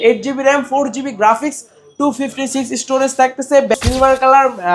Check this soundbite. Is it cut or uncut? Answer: cut